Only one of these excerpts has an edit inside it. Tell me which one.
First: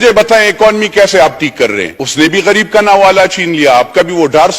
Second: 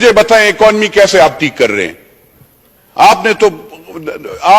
first; 1 cut; at 2.0 s

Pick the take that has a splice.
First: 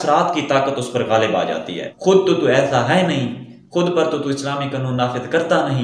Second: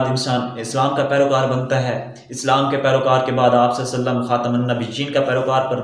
first; 1 cut; at 1.8 s

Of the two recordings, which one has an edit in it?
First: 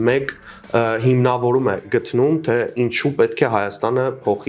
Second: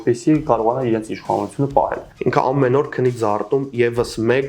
second; 1 cut; at 2.0 s

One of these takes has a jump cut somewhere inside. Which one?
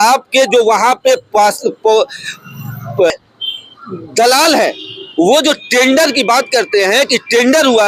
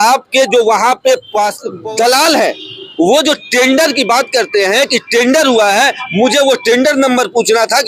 second; 1 cut; at 1.7 s

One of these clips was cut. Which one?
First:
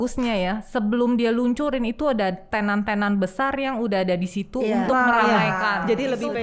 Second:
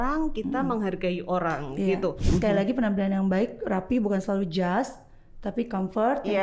second; 1 cut; at 2.2 s

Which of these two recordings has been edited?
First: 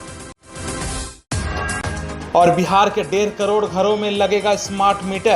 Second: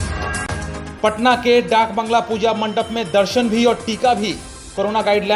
first; 1 cut; at 1.2 s

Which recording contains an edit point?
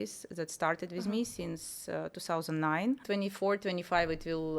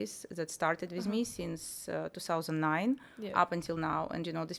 first; 1 cut; at 3.0 s

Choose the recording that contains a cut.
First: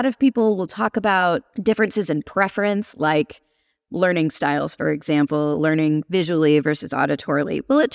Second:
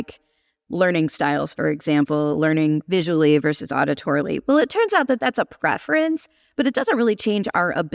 first; 1 cut; at 1.5 s

